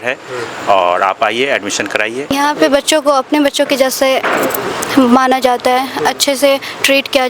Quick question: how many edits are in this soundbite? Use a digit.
1